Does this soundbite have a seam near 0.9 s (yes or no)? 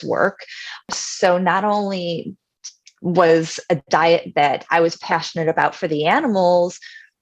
yes